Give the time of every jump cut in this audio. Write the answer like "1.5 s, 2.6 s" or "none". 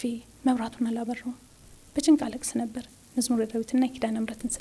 none